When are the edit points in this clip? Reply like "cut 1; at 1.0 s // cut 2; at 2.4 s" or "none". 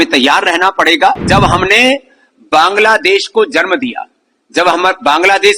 cut 1; at 1.3 s